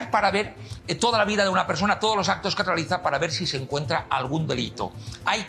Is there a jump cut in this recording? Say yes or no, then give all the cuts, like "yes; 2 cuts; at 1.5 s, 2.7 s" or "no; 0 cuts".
no; 0 cuts